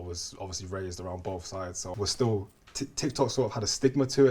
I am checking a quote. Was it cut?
yes; 1 cut; at 1.9 s

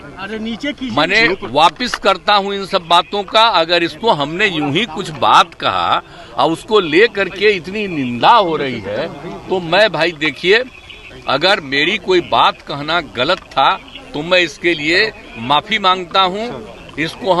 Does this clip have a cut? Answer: no; 0 cuts

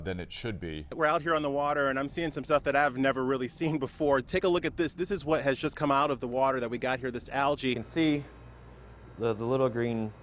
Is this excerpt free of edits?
no; 2 cuts; at 0.9 s, 7.8 s

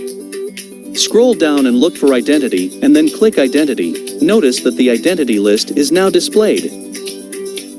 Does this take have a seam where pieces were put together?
yes; 3 cuts; at 1.1 s, 4.0 s, 6.7 s

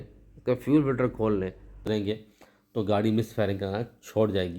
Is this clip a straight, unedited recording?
no; 1 cut; at 1.8 s

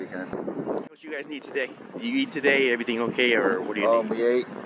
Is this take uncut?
no; 1 cut; at 1.0 s

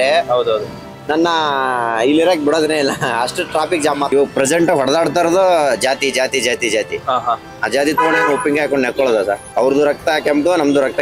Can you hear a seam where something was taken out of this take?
yes; 2 cuts; at 4.1 s, 9.5 s

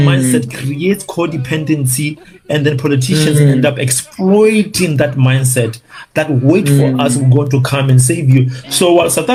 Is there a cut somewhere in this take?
no; 0 cuts

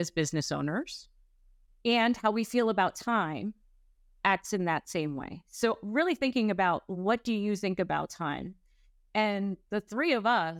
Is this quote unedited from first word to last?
yes; 0 cuts

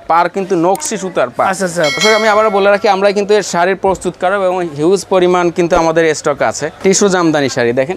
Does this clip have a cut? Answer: yes; 2 cuts; at 2.0 s, 6.8 s

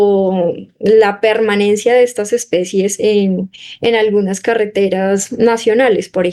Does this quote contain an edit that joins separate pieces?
no; 0 cuts

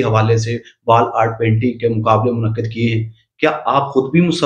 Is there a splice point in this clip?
no; 0 cuts

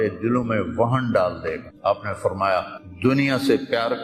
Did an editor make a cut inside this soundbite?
yes; 2 cuts; at 1.7 s, 2.8 s

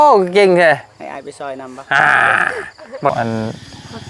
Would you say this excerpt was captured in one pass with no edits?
no; 1 cut; at 3.1 s

